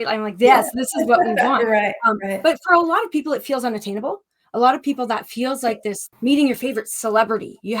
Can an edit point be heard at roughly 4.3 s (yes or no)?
no